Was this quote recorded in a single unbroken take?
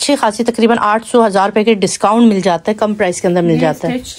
yes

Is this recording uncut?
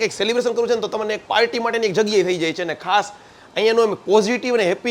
yes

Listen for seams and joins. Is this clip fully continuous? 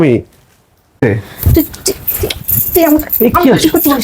no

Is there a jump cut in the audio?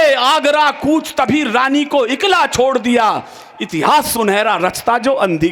no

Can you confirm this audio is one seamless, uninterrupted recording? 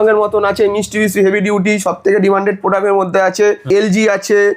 no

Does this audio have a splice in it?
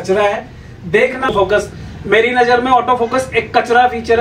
yes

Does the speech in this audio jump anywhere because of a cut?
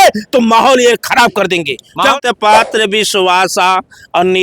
yes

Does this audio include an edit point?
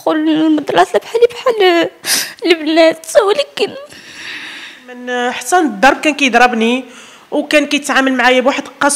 yes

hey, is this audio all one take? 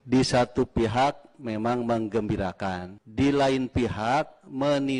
no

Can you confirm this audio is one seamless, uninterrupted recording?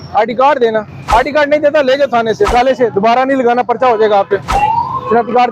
no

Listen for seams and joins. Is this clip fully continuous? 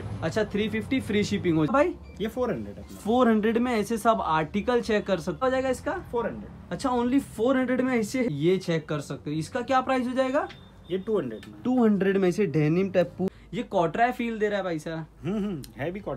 no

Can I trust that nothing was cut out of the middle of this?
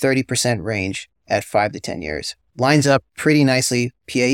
no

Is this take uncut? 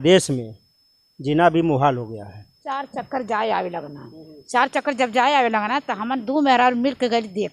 no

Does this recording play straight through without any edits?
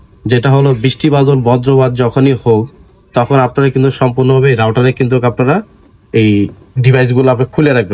yes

